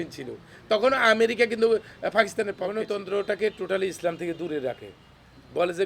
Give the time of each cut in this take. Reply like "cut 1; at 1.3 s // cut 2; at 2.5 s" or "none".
cut 1; at 2.7 s